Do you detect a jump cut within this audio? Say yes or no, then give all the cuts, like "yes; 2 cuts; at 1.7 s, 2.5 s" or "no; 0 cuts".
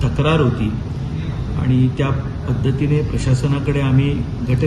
no; 0 cuts